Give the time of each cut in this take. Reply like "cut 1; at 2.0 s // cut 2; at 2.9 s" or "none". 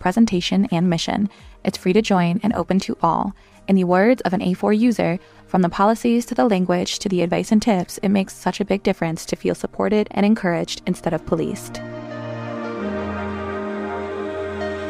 cut 1; at 11.7 s